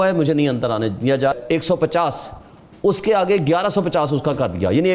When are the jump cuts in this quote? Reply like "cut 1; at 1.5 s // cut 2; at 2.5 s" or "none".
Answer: cut 1; at 1.3 s

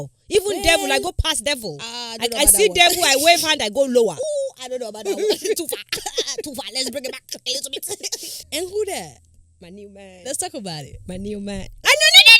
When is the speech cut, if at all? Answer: cut 1; at 8.3 s

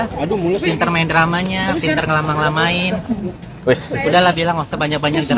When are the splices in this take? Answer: none

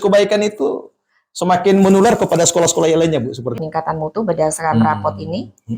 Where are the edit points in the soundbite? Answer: cut 1; at 3.5 s

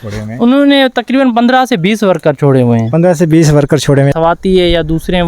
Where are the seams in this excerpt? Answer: cut 1; at 4.1 s

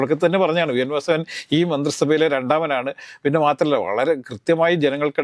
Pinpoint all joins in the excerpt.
none

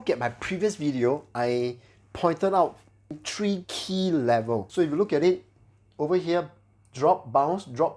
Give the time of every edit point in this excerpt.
cut 1; at 3.2 s // cut 2; at 4.7 s

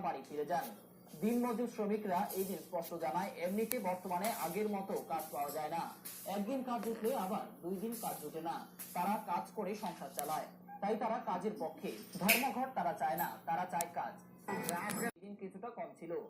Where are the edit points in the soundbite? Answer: cut 1; at 15.2 s

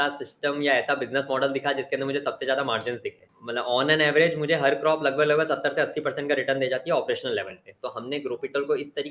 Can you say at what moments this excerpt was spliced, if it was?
cut 1; at 7.7 s

